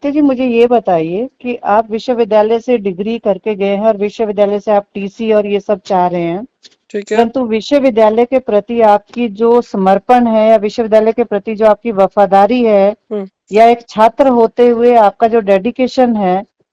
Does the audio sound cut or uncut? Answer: uncut